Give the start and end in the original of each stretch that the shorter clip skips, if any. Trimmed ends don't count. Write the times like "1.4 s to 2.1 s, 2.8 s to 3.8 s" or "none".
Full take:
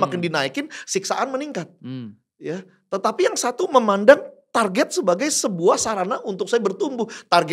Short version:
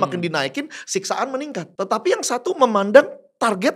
1.7 s to 2.8 s